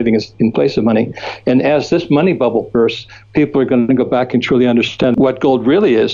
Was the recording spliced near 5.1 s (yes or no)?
yes